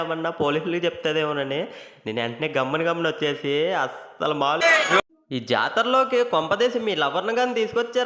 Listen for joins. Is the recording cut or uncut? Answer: cut